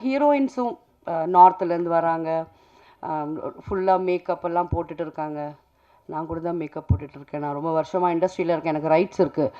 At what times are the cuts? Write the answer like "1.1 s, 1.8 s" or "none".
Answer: none